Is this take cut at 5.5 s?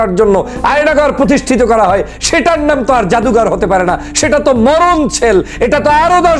no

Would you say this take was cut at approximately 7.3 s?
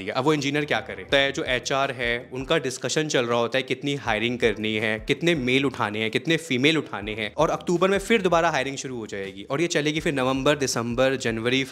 yes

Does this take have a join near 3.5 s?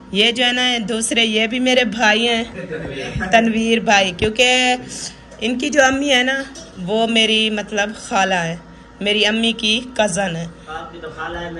no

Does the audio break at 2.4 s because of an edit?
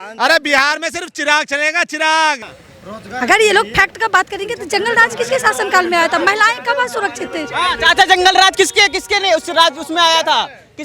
yes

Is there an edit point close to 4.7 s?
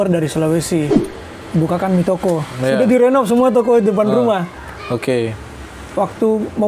no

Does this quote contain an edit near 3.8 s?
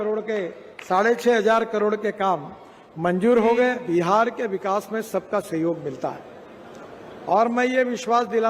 yes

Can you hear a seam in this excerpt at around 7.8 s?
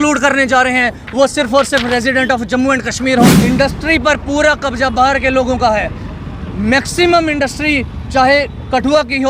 no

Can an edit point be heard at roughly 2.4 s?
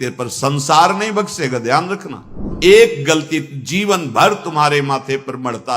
yes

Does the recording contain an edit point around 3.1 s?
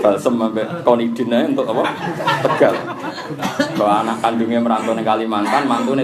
no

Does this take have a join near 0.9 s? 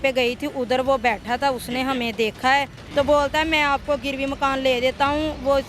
no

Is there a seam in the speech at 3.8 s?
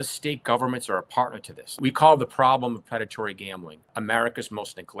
yes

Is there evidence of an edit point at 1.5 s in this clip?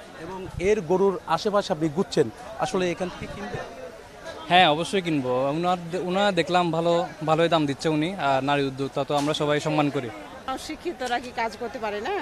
no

